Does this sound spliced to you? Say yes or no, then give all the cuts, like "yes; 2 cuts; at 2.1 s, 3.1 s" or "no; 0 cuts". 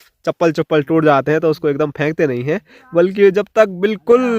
no; 0 cuts